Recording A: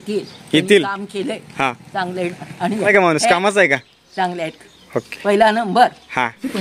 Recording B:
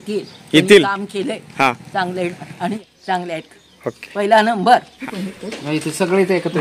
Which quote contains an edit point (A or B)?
B